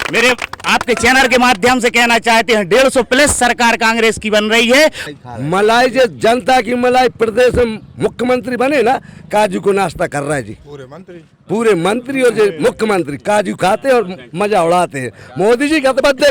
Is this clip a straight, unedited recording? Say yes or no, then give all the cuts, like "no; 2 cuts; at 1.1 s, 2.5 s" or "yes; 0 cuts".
no; 1 cut; at 5.0 s